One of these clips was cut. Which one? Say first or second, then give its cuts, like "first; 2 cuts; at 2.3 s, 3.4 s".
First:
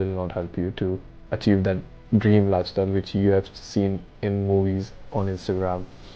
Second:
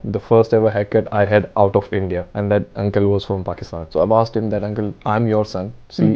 second; 3 cuts; at 2.2 s, 3.7 s, 5.0 s